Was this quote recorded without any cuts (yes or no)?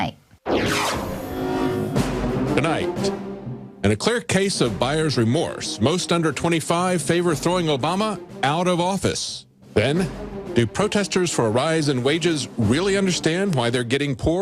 no